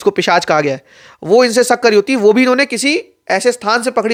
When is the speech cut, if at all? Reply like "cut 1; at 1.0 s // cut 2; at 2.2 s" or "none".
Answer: none